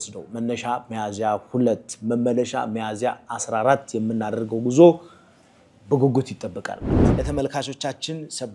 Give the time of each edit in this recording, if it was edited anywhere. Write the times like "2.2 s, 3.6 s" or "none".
7.0 s